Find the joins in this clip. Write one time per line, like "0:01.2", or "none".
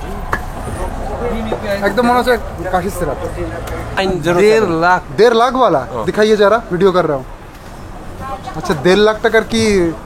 0:04.0